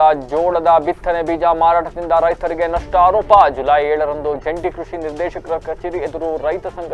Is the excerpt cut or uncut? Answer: uncut